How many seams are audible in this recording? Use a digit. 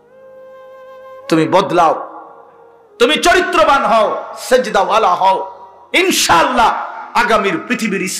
1